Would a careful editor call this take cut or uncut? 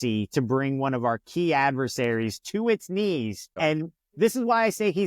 cut